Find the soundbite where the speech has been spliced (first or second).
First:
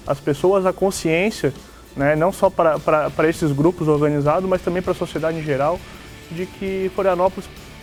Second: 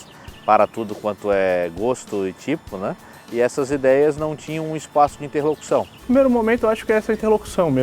second